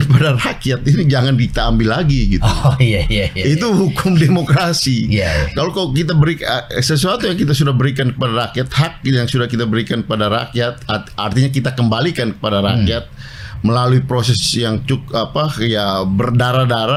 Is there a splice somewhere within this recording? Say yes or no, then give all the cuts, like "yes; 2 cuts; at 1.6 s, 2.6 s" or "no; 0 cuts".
no; 0 cuts